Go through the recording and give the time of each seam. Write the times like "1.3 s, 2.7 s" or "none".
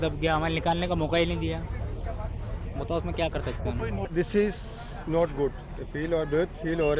4.1 s